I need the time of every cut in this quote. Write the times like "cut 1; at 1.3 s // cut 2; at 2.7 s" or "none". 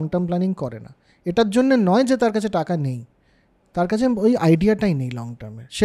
none